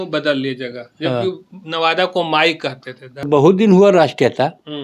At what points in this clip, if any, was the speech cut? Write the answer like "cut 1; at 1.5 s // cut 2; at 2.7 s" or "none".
cut 1; at 3.3 s